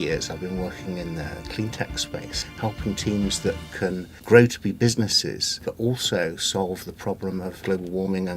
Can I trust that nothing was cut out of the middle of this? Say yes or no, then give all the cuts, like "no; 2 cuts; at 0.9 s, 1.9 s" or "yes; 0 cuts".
no; 4 cuts; at 2.4 s, 4.1 s, 5.6 s, 7.6 s